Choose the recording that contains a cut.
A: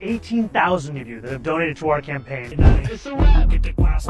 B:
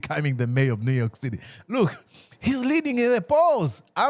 A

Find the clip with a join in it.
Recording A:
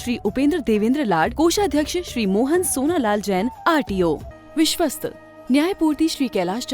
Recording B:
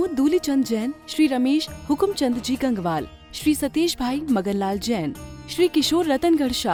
A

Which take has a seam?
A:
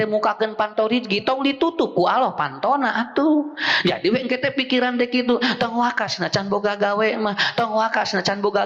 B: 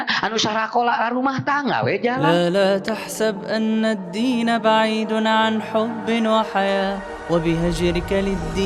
B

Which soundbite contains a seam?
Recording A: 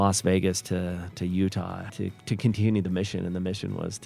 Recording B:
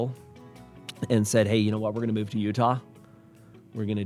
A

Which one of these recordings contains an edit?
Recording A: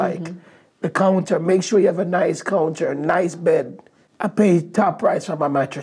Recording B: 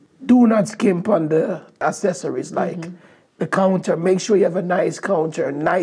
B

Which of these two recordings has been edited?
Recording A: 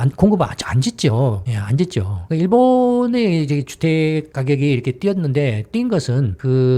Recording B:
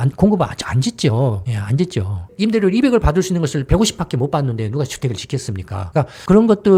A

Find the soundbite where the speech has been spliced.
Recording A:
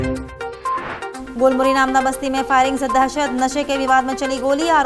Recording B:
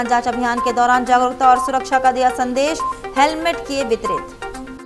A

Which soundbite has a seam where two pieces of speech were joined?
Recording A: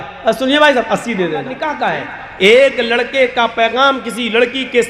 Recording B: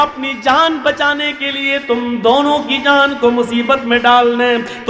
A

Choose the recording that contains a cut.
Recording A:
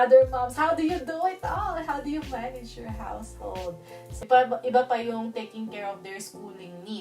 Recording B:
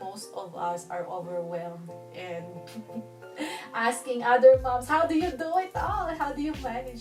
A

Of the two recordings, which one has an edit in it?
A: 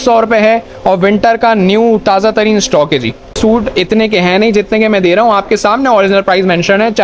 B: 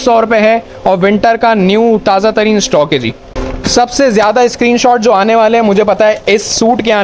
A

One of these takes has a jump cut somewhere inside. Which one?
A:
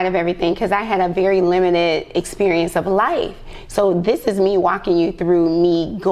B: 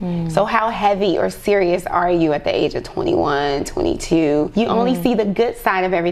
B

